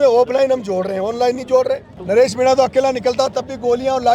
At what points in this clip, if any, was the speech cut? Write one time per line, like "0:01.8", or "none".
0:01.9

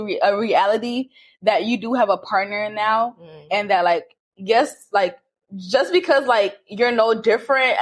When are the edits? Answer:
none

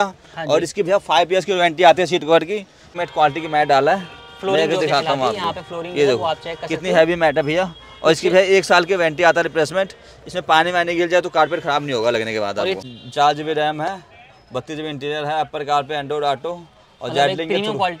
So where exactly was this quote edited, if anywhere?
0:02.9
0:12.8

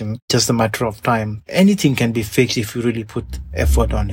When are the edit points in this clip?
none

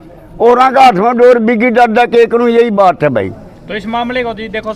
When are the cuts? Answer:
none

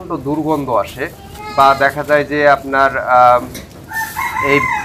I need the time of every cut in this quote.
none

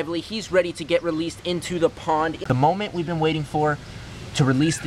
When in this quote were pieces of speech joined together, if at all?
0:02.8

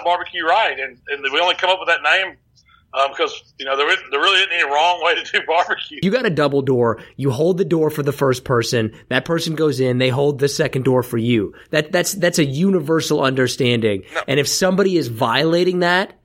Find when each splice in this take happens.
0:06.0

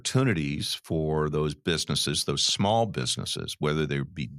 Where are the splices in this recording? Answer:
none

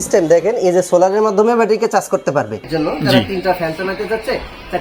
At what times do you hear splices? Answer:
0:02.7

